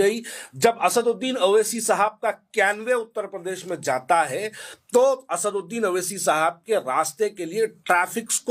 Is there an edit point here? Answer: no; 0 cuts

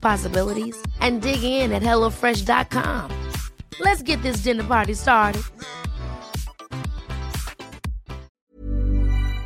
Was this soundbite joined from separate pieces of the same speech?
yes; 1 cut; at 8.4 s

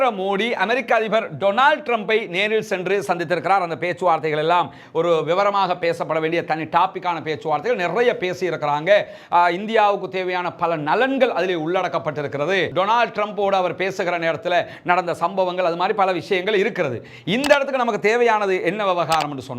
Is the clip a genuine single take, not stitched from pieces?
yes; 0 cuts

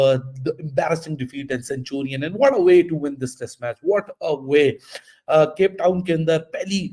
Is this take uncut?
yes; 0 cuts

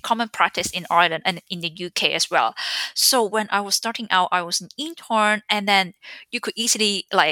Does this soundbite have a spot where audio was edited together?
no; 0 cuts

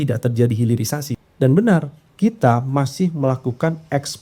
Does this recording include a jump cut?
yes; 2 cuts; at 1.1 s, 2.0 s

